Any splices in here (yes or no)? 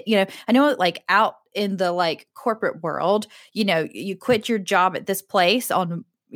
no